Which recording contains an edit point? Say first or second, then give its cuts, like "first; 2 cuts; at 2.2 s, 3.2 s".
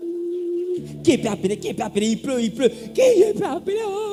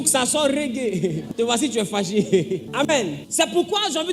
second; 2 cuts; at 1.2 s, 2.8 s